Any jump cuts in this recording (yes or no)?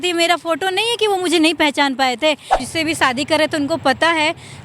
yes